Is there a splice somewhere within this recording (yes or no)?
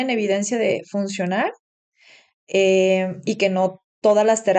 no